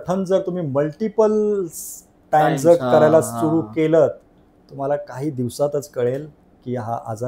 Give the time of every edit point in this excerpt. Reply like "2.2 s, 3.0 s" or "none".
none